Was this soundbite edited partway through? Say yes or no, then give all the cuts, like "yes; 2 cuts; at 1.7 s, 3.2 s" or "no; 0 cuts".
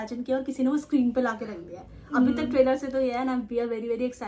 no; 0 cuts